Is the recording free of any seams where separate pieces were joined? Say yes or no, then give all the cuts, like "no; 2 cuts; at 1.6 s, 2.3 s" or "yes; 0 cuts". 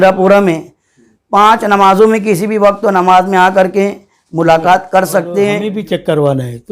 no; 1 cut; at 5.7 s